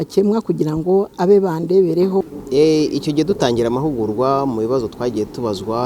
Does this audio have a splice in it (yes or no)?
yes